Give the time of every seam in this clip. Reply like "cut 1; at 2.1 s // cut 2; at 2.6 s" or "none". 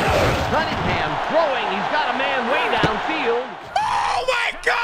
none